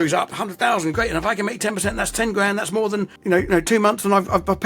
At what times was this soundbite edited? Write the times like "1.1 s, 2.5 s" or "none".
3.5 s